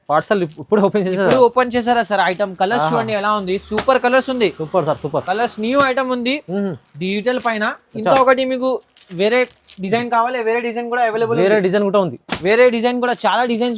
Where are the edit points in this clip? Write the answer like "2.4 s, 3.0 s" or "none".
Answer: none